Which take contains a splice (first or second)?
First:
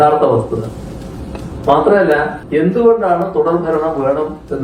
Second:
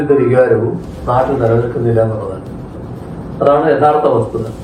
first